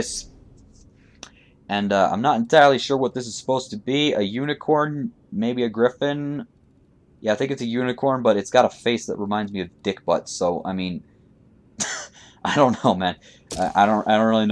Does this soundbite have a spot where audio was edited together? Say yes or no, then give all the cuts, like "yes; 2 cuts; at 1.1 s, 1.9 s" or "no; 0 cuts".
no; 0 cuts